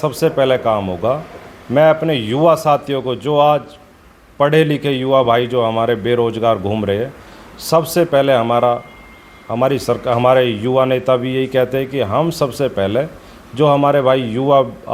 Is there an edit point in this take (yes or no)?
no